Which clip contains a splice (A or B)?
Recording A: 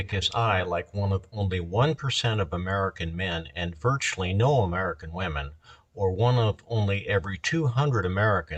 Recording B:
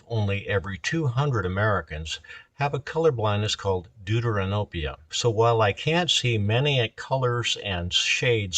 B